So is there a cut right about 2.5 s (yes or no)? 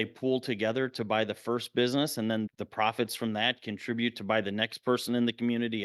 yes